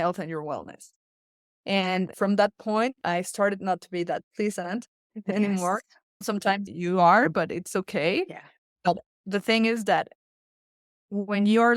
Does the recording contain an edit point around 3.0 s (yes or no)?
yes